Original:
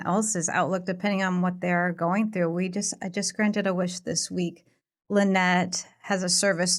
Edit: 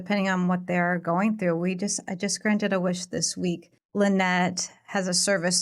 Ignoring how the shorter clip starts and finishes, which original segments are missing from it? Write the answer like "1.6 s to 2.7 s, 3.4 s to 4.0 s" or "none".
4.7 s to 4.9 s